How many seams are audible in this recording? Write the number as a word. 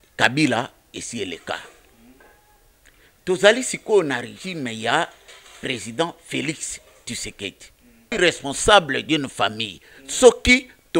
one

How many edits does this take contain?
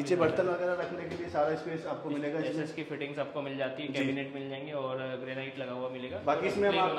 zero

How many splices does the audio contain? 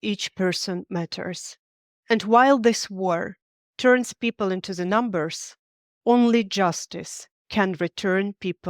zero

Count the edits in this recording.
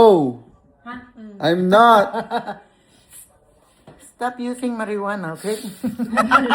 zero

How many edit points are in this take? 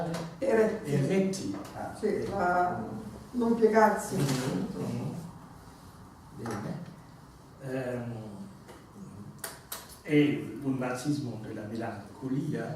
one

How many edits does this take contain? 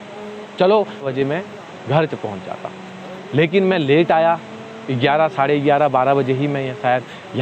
one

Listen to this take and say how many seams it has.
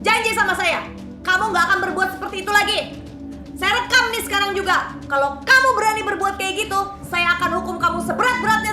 zero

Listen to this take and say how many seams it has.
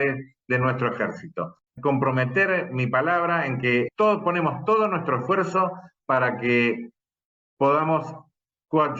two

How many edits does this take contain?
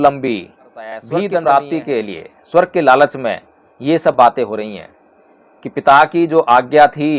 one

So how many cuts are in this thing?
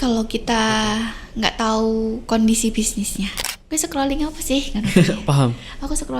one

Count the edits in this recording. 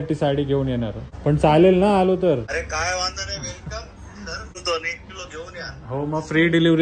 three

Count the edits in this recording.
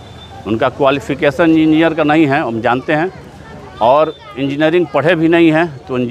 zero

